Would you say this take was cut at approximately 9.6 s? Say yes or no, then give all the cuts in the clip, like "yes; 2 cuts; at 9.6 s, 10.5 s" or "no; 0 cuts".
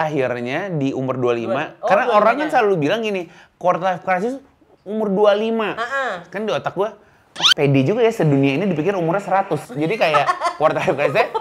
no; 0 cuts